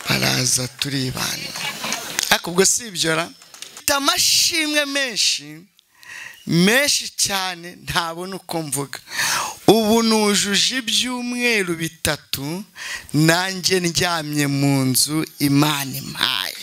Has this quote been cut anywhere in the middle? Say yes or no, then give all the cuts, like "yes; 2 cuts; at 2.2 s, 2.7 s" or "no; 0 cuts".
yes; 1 cut; at 3.8 s